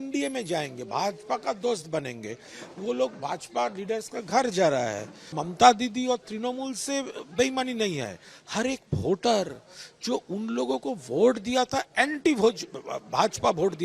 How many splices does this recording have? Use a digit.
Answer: 1